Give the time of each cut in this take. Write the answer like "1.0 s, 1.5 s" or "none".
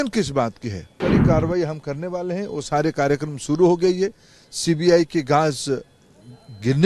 1.0 s